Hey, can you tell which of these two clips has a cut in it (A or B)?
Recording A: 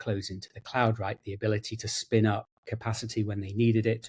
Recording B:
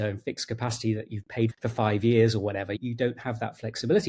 B